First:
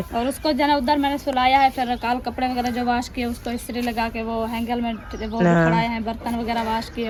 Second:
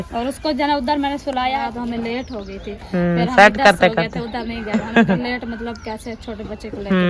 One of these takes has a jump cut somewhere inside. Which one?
second; 1 cut; at 1.6 s

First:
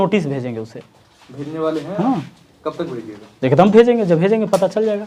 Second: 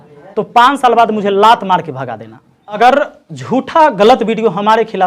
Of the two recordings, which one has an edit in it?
second; 1 cut; at 2.8 s

